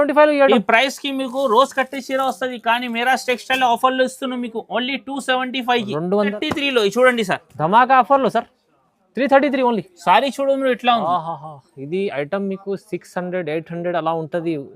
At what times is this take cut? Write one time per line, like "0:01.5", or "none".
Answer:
0:06.3